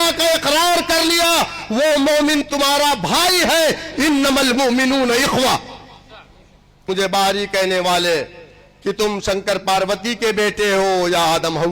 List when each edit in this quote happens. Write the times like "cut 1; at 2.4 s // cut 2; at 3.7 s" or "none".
cut 1; at 6.8 s